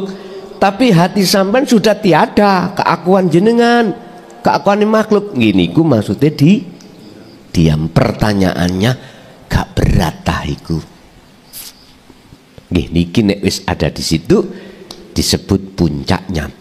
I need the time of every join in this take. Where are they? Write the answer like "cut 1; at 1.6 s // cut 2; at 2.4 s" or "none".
cut 1; at 12.4 s